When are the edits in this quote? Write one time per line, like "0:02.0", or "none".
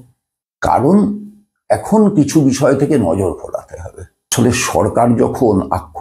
0:04.3